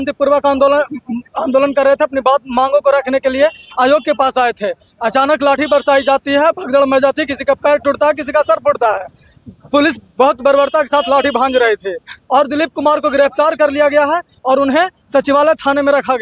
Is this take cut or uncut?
uncut